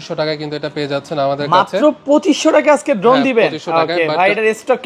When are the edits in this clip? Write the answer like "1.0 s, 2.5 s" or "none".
none